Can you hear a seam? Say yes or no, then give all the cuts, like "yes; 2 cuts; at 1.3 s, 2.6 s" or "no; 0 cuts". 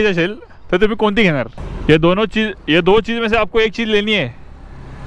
yes; 1 cut; at 1.7 s